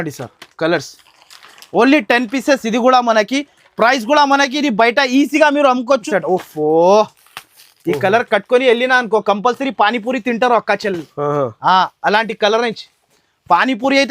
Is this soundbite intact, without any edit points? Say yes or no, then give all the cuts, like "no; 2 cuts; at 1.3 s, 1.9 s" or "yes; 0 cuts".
no; 1 cut; at 6.0 s